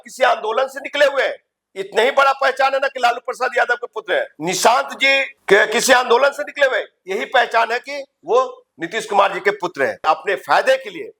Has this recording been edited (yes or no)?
yes